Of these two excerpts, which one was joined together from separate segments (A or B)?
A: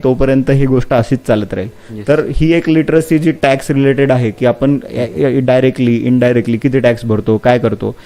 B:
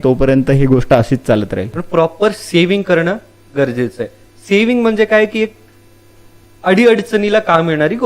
B